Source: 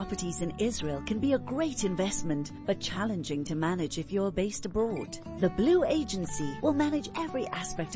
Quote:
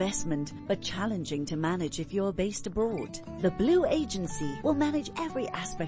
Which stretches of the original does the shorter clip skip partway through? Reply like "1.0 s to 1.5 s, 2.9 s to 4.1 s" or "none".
none